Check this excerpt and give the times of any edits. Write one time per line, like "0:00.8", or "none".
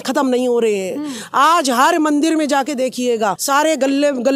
0:03.4